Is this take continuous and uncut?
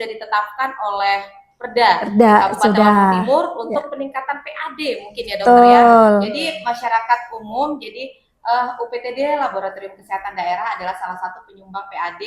yes; 0 cuts

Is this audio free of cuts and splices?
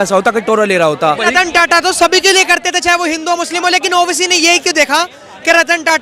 no; 1 cut; at 1.2 s

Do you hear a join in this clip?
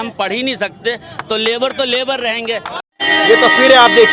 yes; 1 cut; at 2.7 s

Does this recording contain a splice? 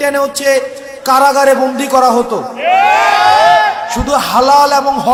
no; 0 cuts

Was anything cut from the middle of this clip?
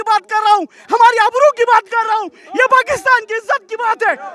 no; 0 cuts

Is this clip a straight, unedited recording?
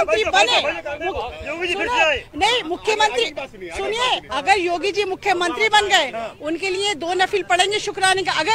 yes; 0 cuts

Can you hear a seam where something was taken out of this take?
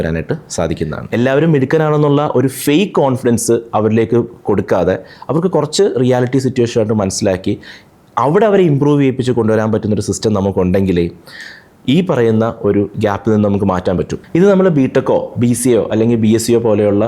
yes; 2 cuts; at 1.1 s, 14.2 s

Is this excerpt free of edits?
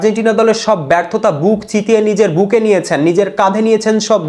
yes; 0 cuts

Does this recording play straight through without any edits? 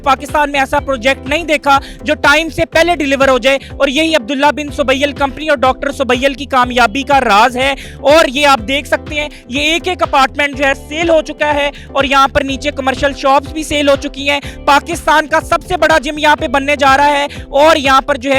yes; 0 cuts

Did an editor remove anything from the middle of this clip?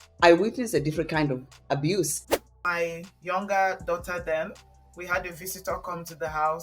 yes; 1 cut; at 2.2 s

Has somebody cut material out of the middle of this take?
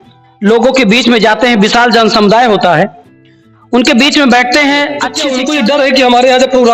yes; 1 cut; at 5.2 s

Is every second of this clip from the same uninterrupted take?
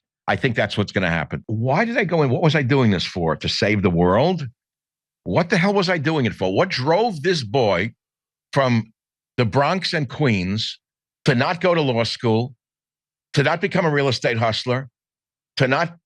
no; 1 cut; at 1.4 s

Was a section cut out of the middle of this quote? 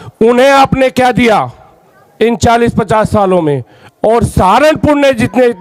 no; 0 cuts

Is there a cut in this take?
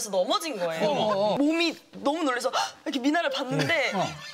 yes; 1 cut; at 1.4 s

